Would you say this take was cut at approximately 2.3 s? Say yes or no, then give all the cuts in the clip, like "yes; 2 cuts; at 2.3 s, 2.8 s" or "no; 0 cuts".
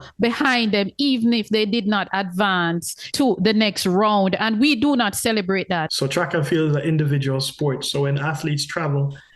no; 1 cut; at 5.9 s